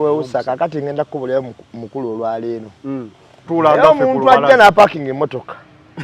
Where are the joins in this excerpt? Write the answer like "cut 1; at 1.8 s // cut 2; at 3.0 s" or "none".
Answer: cut 1; at 3.5 s

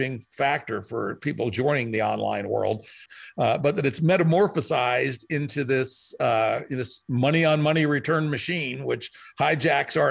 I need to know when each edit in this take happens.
cut 1; at 3.0 s

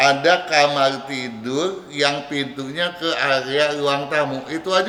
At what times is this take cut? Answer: none

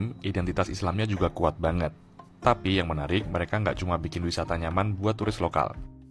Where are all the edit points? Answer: none

